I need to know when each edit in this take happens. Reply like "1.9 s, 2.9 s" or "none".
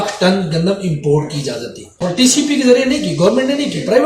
2.0 s